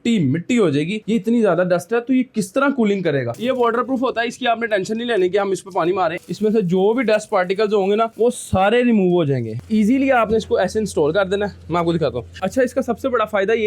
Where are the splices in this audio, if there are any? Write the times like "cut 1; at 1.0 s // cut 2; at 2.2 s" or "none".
cut 1; at 3.3 s // cut 2; at 6.2 s // cut 3; at 9.5 s // cut 4; at 12.3 s